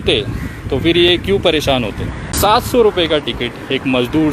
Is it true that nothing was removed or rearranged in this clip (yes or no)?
no